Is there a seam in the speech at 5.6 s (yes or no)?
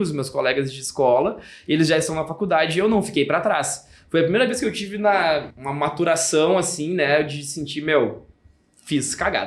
yes